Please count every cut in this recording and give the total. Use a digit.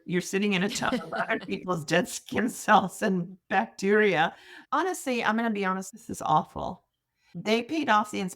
1